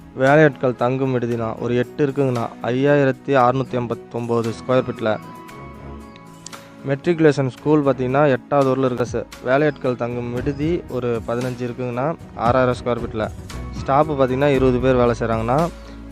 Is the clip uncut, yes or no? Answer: no